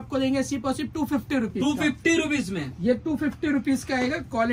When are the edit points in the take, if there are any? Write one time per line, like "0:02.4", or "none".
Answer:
none